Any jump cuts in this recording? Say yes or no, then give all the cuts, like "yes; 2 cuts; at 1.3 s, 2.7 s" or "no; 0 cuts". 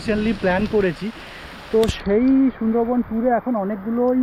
no; 0 cuts